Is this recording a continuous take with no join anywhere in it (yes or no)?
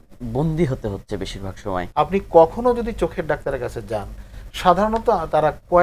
no